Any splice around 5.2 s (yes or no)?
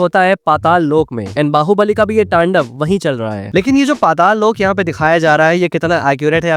no